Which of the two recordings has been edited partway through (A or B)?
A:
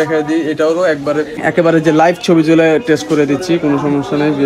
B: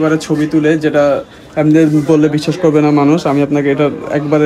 A